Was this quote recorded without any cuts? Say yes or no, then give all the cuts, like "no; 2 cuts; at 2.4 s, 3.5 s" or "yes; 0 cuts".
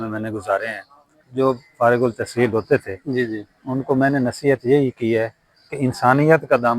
no; 1 cut; at 1.2 s